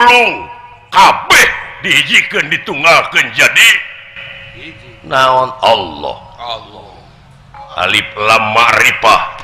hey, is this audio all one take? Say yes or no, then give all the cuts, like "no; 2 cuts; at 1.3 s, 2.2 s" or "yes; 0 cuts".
no; 1 cut; at 7.6 s